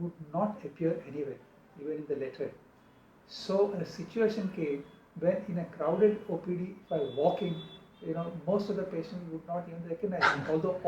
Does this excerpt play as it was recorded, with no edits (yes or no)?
yes